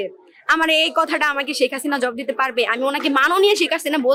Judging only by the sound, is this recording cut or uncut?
uncut